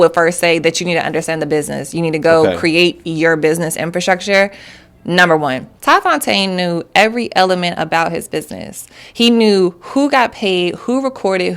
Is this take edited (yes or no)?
yes